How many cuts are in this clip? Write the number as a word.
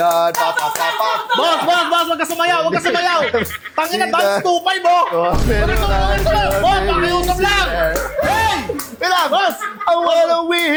zero